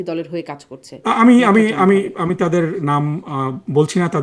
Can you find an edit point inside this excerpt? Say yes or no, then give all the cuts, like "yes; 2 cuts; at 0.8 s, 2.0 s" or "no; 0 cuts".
no; 0 cuts